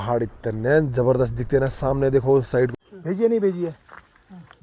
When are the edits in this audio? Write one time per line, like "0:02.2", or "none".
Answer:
0:02.7